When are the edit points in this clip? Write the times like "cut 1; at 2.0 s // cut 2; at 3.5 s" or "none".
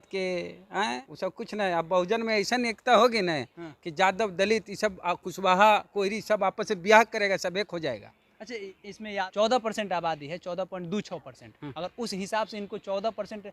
cut 1; at 1.1 s // cut 2; at 9.2 s